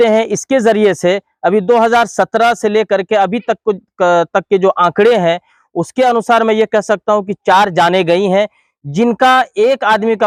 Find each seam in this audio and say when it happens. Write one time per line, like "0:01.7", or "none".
none